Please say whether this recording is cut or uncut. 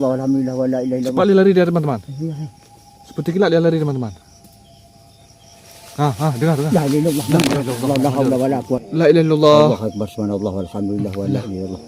cut